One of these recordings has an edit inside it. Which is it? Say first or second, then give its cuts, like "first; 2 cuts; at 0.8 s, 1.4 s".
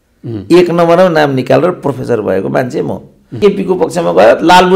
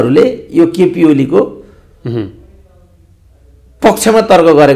first; 1 cut; at 3.3 s